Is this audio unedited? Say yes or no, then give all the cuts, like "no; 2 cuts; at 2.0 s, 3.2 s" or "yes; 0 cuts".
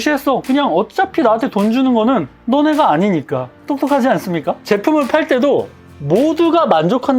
no; 1 cut; at 4.6 s